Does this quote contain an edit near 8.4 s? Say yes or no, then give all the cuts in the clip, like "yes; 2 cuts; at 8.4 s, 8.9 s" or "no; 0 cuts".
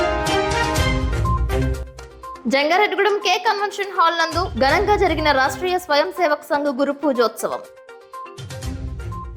no; 1 cut; at 1.7 s